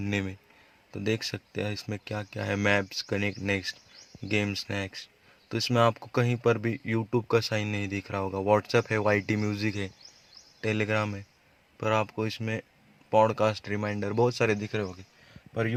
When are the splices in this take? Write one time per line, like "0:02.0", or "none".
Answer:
none

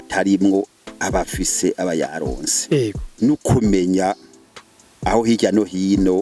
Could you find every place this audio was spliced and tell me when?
0:03.0

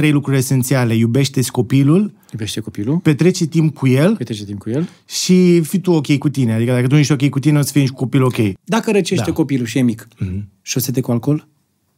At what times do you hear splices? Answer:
0:08.6

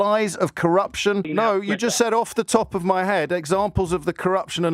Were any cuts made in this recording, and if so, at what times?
0:01.3

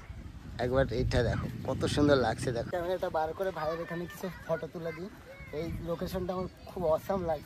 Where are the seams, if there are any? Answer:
0:02.7

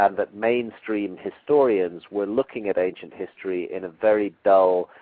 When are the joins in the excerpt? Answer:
none

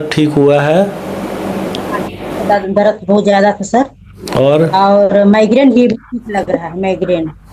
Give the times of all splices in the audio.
none

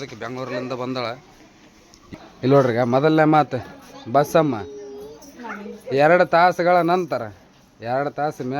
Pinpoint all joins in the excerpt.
0:02.0

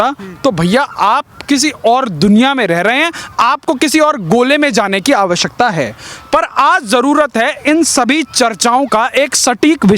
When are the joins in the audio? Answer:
none

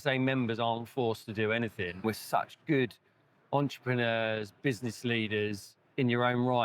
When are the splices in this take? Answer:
0:02.0

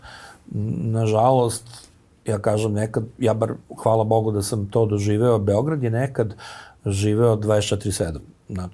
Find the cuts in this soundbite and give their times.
none

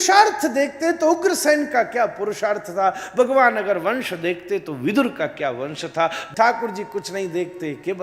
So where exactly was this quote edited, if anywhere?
0:06.2

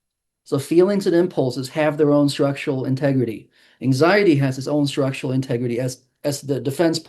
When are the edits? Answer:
none

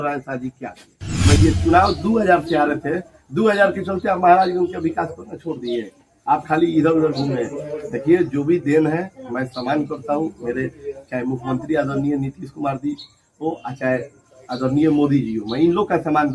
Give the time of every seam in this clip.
0:01.4

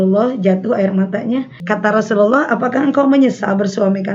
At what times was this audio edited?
0:01.6

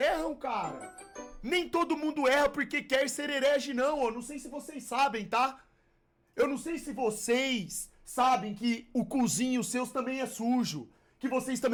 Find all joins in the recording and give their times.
none

